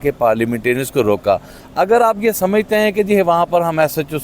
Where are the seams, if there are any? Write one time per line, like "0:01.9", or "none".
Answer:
none